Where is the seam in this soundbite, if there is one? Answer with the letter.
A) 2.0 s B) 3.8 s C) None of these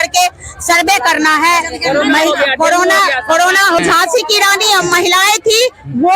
B